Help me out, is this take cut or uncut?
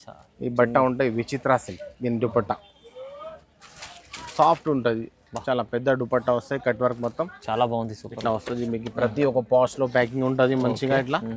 uncut